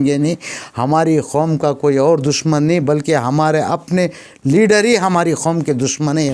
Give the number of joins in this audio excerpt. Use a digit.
0